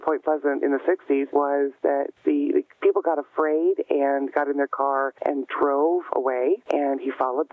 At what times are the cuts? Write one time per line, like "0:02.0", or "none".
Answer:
0:01.3
0:02.1
0:05.1
0:06.6